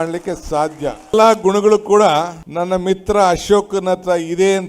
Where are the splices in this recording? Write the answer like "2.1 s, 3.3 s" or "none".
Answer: 1.1 s, 2.4 s